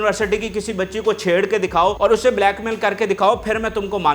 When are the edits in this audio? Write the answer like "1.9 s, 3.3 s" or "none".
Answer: 2.0 s